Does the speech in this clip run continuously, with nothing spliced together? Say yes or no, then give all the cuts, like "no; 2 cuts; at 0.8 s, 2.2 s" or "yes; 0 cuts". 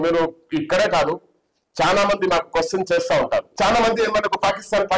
no; 1 cut; at 3.5 s